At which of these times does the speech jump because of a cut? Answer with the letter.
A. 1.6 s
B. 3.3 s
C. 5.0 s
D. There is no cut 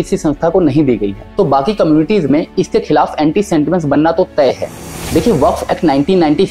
C